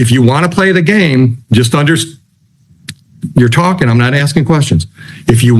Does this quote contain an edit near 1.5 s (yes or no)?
no